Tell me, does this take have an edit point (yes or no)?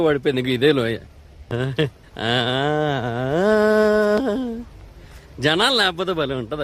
yes